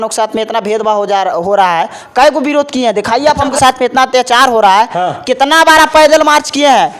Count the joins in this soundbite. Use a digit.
1